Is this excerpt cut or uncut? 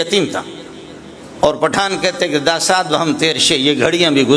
cut